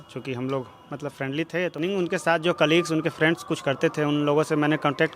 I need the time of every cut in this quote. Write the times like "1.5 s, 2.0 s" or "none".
1.8 s